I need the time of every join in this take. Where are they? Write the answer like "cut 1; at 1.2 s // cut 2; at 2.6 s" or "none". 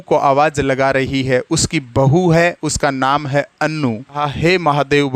cut 1; at 4.2 s